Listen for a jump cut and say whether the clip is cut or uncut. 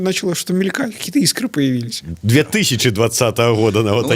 cut